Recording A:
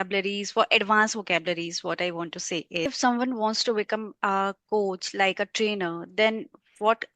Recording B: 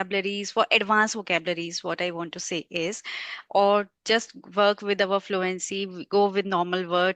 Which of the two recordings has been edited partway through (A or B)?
A